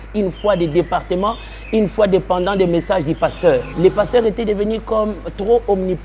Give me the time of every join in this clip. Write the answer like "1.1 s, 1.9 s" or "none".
3.7 s